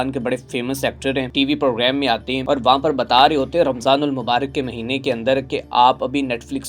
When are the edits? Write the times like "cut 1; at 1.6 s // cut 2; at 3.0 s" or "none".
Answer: cut 1; at 1.3 s // cut 2; at 2.3 s

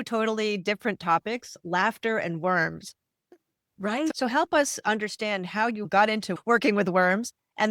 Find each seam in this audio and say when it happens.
cut 1; at 4.1 s

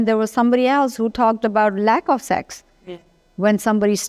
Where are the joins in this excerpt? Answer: none

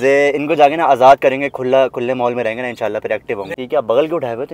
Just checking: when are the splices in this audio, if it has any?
cut 1; at 3.5 s

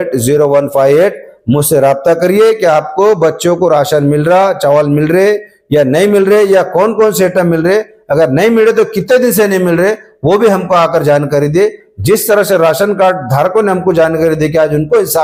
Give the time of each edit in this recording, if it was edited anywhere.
none

